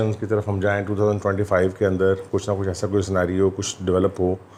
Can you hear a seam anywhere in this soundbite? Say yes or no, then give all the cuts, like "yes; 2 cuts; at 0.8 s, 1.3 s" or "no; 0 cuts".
no; 0 cuts